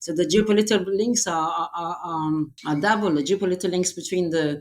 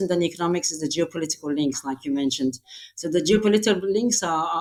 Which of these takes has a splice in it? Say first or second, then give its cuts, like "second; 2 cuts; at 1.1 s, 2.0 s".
first; 1 cut; at 2.6 s